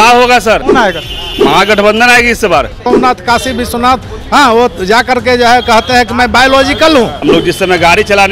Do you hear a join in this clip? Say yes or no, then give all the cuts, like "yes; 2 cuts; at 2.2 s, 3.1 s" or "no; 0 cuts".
yes; 3 cuts; at 0.9 s, 2.9 s, 7.2 s